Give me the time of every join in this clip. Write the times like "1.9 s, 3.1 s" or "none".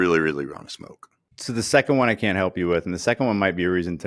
none

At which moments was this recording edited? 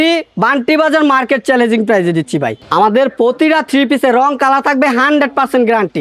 2.6 s

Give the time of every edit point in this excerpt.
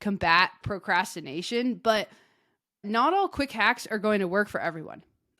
2.8 s

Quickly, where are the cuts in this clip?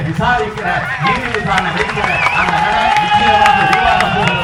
none

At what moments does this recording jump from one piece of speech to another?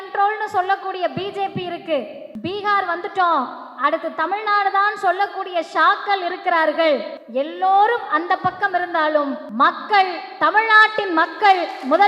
2.2 s, 7.2 s, 9.4 s

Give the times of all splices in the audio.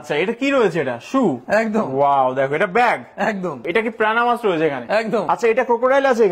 3.6 s, 5.3 s

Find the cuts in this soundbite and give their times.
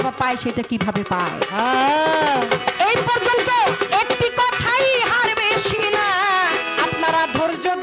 none

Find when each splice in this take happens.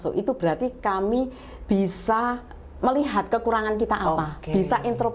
none

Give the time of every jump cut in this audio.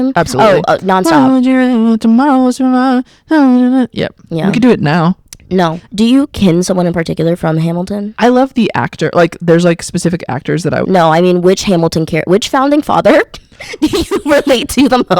5.9 s, 10.8 s

